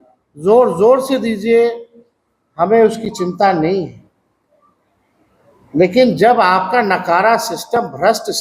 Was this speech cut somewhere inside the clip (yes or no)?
no